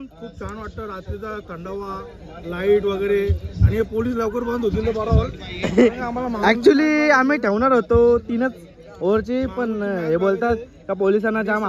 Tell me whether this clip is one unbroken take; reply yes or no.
yes